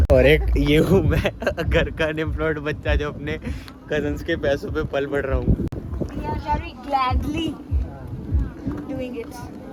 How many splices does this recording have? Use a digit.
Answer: 0